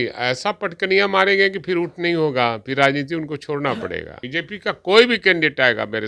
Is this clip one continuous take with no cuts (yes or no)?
no